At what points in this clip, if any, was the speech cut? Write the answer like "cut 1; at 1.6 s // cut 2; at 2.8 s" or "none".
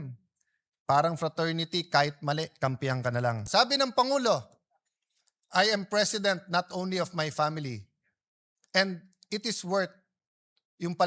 cut 1; at 3.5 s